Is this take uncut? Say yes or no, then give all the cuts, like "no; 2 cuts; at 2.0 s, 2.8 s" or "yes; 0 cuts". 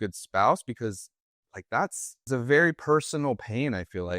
no; 1 cut; at 2.2 s